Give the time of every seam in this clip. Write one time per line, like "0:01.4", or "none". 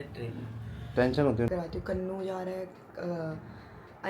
0:01.5